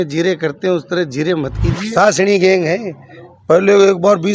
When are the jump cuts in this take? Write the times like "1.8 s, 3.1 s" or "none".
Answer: 1.7 s